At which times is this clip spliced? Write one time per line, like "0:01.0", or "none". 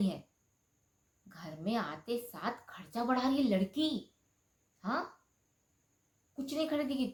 none